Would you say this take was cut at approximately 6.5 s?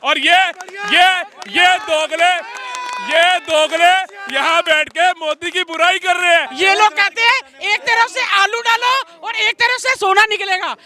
yes; 1 cut; at 6.5 s

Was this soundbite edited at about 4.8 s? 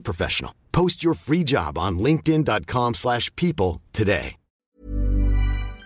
yes; 1 cut; at 4.8 s

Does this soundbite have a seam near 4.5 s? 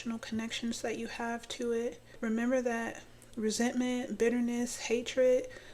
no; 1 cut; at 2.1 s

